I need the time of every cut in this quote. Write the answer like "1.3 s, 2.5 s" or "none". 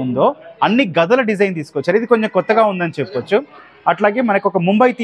none